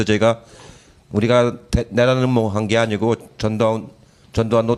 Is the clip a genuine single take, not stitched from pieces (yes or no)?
no